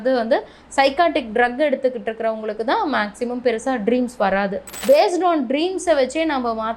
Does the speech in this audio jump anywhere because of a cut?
yes; 1 cut; at 4.8 s

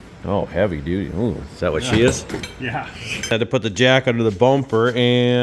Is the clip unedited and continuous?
no; 1 cut; at 3.2 s

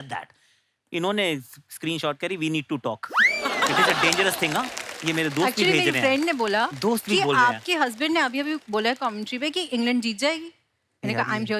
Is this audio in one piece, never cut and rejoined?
yes; 0 cuts

